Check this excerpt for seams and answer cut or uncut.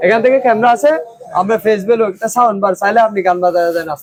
uncut